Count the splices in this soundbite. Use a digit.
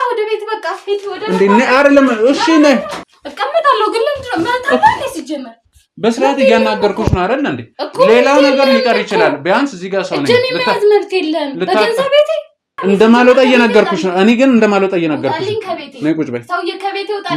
2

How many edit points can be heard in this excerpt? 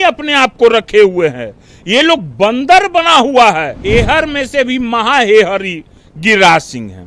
1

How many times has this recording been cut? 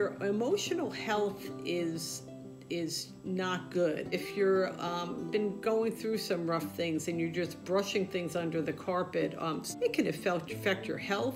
2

